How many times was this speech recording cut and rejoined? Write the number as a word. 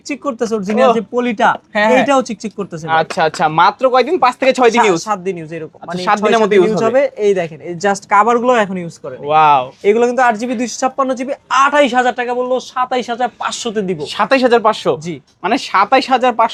zero